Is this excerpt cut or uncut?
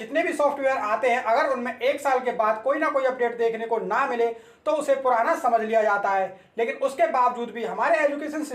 uncut